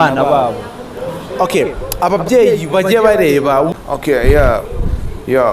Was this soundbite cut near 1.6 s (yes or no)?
no